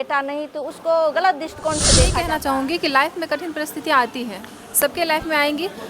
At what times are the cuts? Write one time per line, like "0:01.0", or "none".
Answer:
0:01.9